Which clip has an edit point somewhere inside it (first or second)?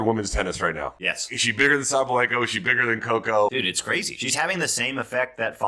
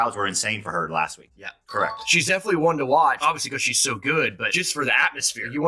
second